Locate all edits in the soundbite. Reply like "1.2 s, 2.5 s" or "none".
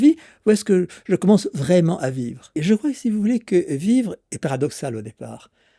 2.6 s